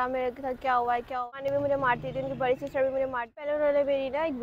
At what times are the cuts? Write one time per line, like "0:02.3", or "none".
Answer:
0:01.3
0:03.5